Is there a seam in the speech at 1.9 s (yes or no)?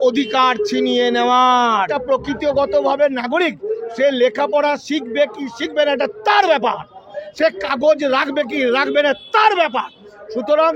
yes